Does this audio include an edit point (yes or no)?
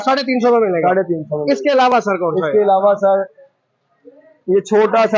no